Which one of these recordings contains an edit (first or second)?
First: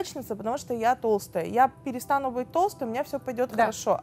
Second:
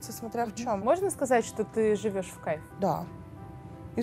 second